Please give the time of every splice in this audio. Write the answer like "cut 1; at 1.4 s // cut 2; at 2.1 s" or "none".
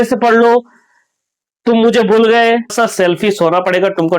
cut 1; at 2.7 s

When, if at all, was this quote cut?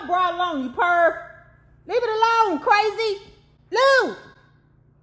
none

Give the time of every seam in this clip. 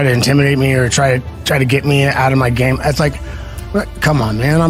none

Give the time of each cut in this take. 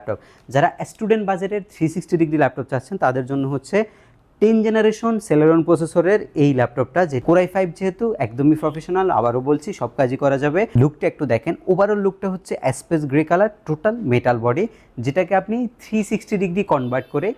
cut 1; at 7.2 s // cut 2; at 10.7 s

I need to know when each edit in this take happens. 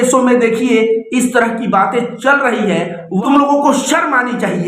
cut 1; at 3.2 s

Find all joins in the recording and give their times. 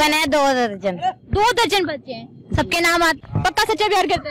cut 1; at 3.3 s

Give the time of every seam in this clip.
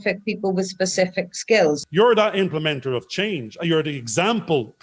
cut 1; at 1.8 s

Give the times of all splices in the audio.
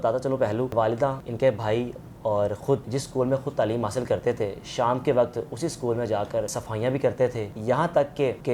cut 1; at 1.1 s // cut 2; at 2.9 s // cut 3; at 6.6 s // cut 4; at 7.5 s

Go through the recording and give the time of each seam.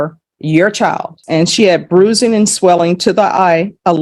cut 1; at 1.2 s

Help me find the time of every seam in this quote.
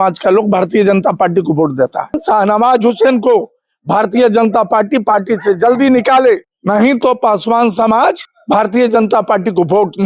cut 1; at 2.2 s // cut 2; at 6.5 s // cut 3; at 8.3 s

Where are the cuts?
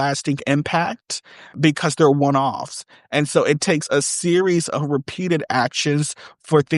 cut 1; at 1.6 s

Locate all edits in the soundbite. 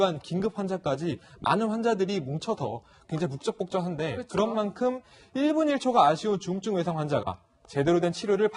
cut 1; at 1.6 s

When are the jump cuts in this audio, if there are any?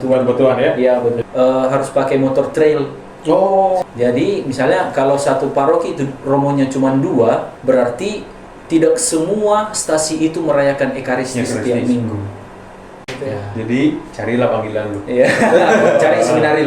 cut 1; at 1.2 s // cut 2; at 3.8 s // cut 3; at 7.5 s // cut 4; at 13.1 s

